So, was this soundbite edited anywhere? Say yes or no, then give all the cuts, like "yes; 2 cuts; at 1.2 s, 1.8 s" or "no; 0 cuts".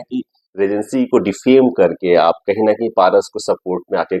no; 0 cuts